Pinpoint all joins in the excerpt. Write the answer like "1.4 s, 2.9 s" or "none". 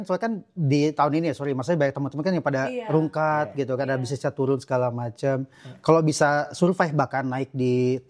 none